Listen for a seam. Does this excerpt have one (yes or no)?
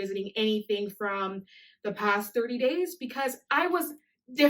no